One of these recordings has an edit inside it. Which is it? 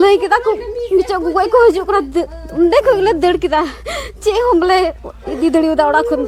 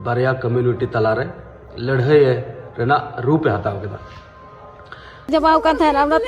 second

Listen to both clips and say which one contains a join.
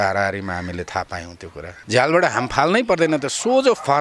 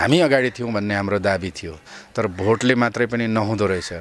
first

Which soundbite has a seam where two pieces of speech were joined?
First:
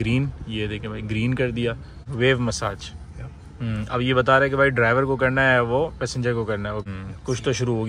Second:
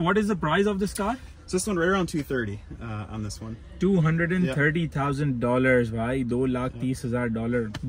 first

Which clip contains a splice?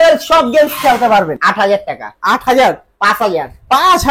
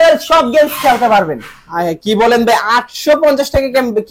first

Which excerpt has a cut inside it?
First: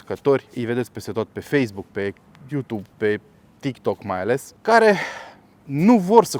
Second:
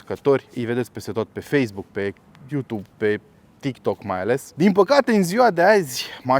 second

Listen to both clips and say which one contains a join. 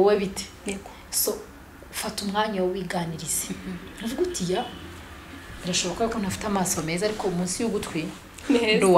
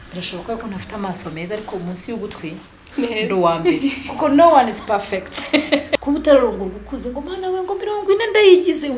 second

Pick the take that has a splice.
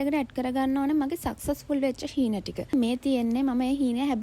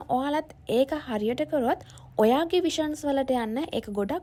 first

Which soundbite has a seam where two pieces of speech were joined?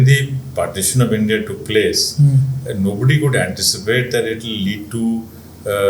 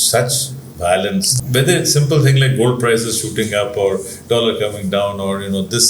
second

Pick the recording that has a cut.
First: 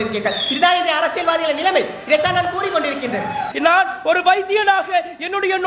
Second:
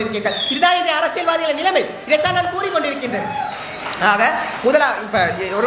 first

